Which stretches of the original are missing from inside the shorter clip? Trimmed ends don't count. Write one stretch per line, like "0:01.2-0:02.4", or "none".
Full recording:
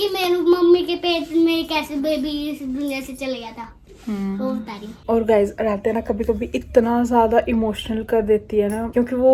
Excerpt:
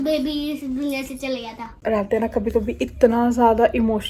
0:03.8-0:05.5